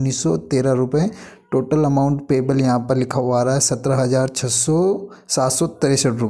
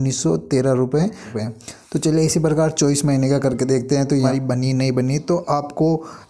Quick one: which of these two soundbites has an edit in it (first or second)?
second